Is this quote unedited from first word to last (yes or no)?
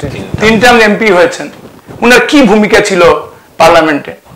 yes